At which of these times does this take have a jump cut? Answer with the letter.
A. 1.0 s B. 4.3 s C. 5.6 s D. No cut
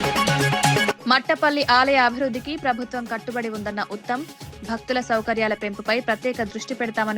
A